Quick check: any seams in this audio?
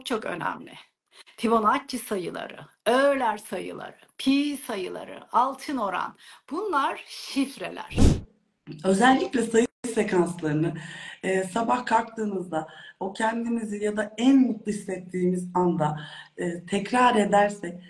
yes; 1 cut; at 8.0 s

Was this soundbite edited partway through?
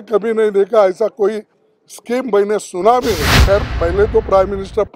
yes; 1 cut; at 3.3 s

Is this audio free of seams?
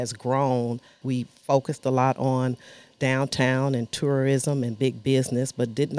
no; 1 cut; at 1.0 s

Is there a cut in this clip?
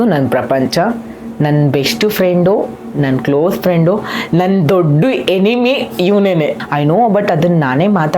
yes; 1 cut; at 6.6 s

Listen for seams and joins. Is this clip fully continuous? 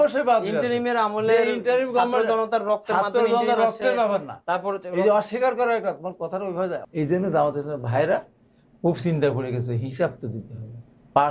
no; 1 cut; at 6.8 s

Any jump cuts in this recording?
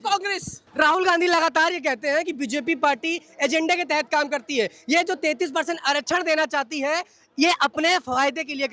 no; 0 cuts

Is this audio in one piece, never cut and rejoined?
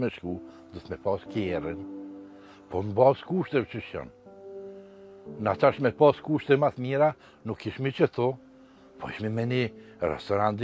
yes; 0 cuts

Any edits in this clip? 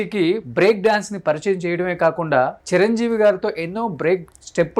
no; 0 cuts

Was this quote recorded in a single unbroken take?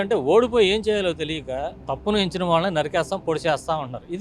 yes; 0 cuts

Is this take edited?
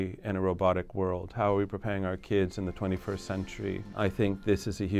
yes; 1 cut; at 3.9 s

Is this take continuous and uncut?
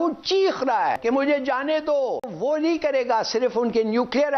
no; 2 cuts; at 1.0 s, 2.3 s

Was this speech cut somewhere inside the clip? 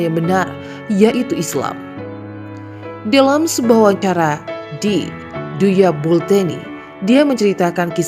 yes; 2 cuts; at 1.7 s, 3.0 s

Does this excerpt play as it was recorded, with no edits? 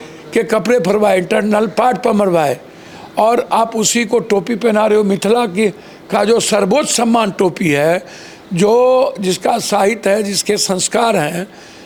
yes; 0 cuts

